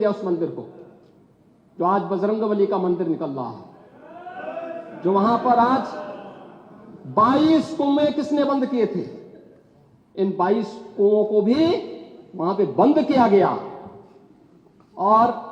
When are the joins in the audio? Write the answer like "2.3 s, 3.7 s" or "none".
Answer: none